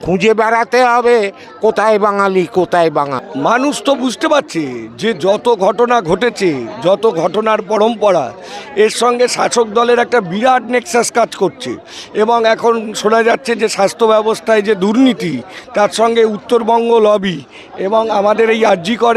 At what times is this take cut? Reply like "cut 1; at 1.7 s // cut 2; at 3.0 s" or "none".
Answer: cut 1; at 3.2 s